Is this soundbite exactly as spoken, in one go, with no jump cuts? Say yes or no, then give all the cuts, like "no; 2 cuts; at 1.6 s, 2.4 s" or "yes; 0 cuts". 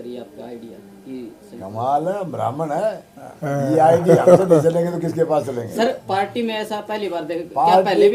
yes; 0 cuts